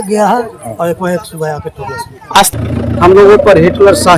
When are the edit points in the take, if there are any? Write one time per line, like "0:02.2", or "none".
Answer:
0:02.5